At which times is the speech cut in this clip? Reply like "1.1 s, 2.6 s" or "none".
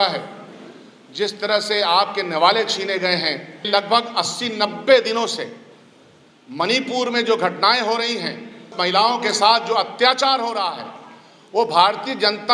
3.7 s, 8.7 s